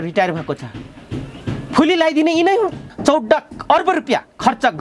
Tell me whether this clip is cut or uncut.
cut